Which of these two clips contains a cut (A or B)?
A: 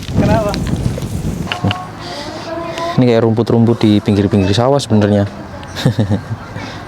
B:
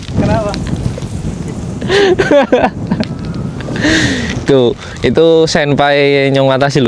A